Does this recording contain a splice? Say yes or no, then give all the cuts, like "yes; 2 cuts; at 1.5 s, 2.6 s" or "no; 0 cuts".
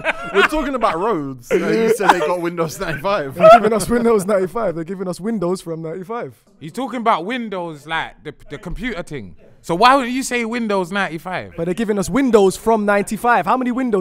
yes; 1 cut; at 6.7 s